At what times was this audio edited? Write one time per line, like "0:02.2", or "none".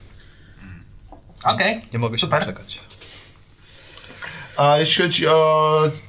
none